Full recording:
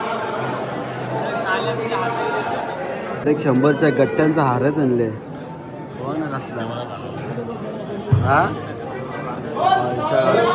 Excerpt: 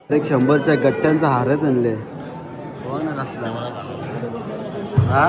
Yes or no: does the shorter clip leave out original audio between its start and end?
no